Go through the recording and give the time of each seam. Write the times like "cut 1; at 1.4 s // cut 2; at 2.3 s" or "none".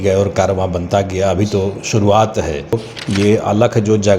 cut 1; at 2.7 s